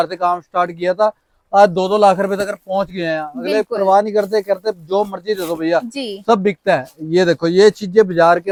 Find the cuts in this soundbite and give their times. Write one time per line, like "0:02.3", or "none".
none